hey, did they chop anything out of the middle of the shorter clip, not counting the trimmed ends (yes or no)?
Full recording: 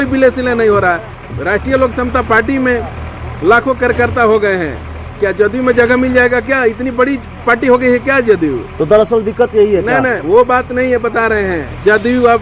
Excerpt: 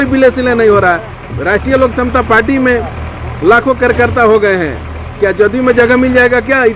no